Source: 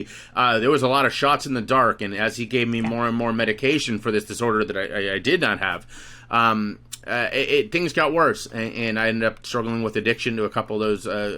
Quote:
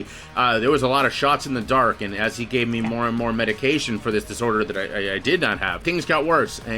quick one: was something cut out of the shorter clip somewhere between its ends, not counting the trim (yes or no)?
yes